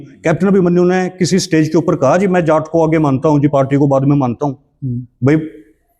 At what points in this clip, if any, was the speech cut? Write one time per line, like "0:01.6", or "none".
none